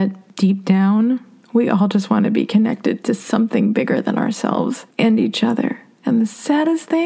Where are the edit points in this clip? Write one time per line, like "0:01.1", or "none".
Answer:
0:04.9
0:05.9